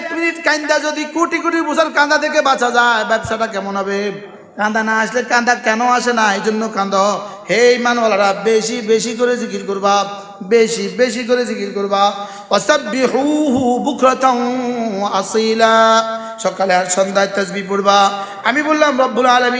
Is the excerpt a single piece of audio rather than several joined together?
no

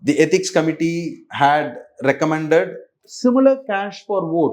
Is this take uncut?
no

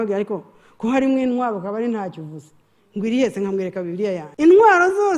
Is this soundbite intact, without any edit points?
no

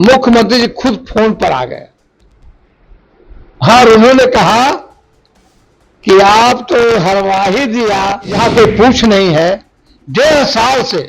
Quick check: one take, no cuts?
no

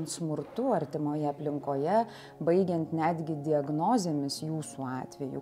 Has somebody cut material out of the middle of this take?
no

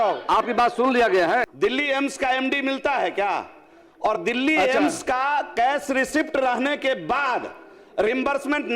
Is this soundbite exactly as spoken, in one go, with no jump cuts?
no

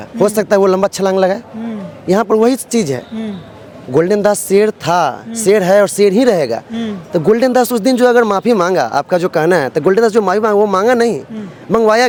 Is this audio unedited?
yes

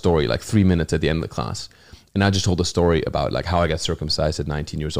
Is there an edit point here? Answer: no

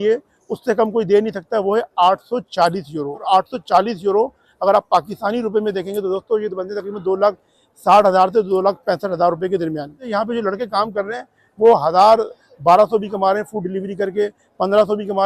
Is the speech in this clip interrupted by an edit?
yes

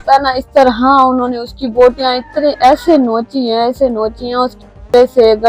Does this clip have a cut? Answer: no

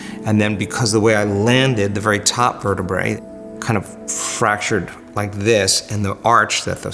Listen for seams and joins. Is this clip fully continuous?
no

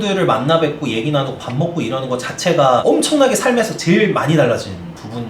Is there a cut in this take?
no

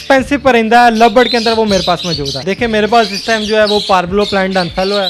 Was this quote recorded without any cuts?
no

